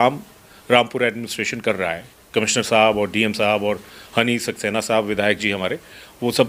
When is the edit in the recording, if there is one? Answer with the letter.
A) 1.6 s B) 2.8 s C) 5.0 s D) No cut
D